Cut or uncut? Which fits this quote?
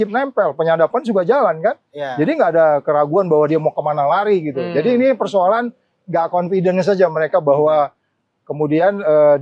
uncut